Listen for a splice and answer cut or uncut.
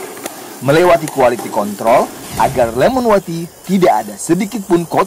uncut